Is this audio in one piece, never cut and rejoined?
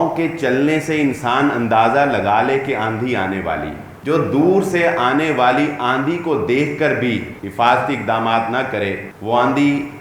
no; 3 cuts; at 3.9 s, 7.4 s, 9.1 s

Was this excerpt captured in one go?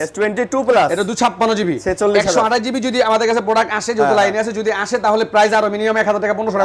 yes; 0 cuts

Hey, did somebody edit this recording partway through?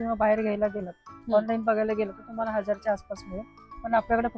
no; 0 cuts

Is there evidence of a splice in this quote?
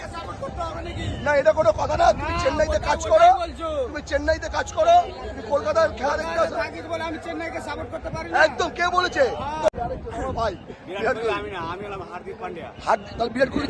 yes; 1 cut; at 9.7 s

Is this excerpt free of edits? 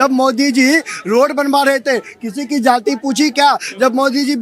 yes; 0 cuts

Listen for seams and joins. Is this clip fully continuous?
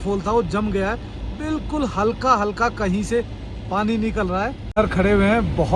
no; 1 cut; at 4.6 s

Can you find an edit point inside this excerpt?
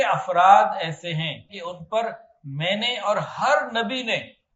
yes; 1 cut; at 1.5 s

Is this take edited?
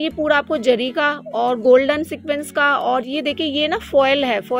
no; 0 cuts

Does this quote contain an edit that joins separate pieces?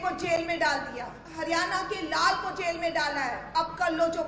yes; 2 cuts; at 1.2 s, 3.4 s

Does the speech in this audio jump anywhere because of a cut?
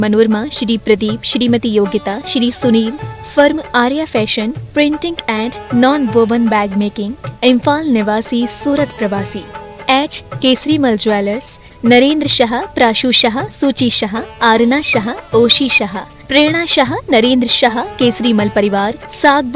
no; 0 cuts

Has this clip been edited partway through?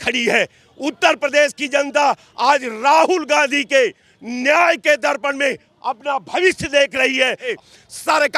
yes; 1 cut; at 7.5 s

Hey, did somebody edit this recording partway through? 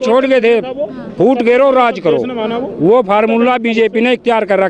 no; 0 cuts

